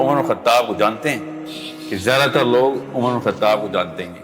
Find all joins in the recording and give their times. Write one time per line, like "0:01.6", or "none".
0:01.2